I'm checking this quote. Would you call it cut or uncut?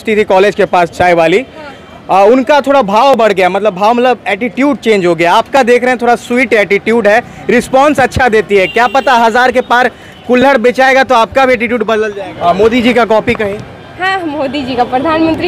cut